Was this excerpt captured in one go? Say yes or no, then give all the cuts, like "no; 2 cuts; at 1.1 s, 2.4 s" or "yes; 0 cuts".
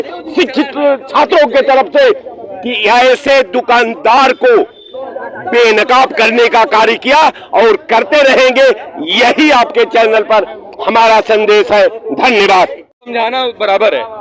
no; 1 cut; at 13.1 s